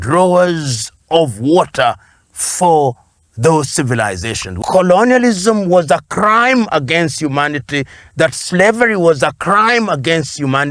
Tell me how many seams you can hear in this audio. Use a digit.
1